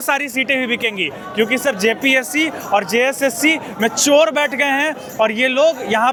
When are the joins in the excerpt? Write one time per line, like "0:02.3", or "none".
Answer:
none